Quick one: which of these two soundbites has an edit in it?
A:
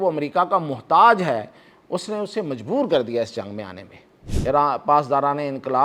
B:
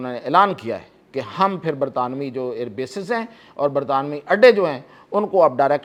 A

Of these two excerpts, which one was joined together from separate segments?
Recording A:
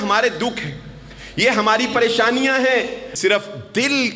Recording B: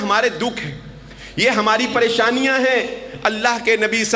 A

